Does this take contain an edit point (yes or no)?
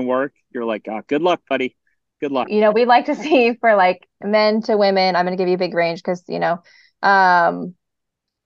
yes